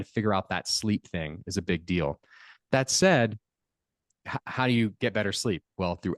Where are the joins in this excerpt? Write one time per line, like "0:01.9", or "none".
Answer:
0:04.2